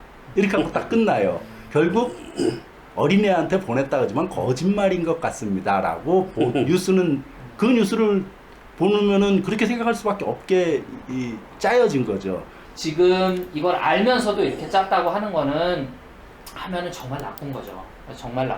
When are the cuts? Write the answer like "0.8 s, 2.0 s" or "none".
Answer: 12.6 s